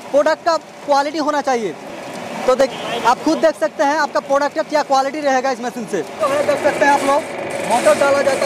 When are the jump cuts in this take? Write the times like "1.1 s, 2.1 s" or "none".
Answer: none

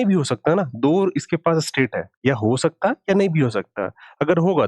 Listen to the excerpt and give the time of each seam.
none

